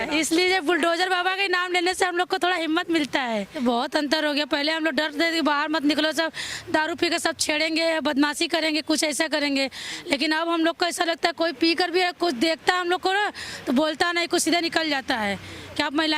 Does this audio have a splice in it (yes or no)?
yes